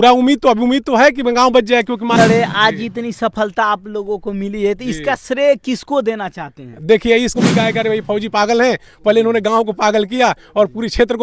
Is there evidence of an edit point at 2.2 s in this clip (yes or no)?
yes